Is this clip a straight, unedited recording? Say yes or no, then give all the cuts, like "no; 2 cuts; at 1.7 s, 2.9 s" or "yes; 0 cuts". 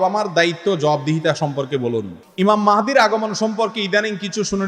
no; 1 cut; at 2.2 s